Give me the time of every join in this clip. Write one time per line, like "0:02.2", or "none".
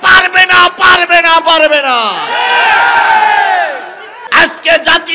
0:04.1

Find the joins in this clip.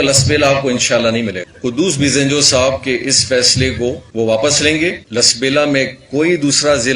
0:01.5
0:04.0
0:05.0

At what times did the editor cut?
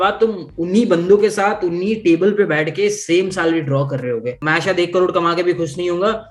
0:04.4

